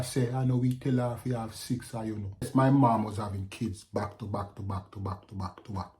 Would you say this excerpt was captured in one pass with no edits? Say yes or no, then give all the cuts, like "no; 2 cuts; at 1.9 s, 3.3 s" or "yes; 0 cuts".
no; 1 cut; at 2.5 s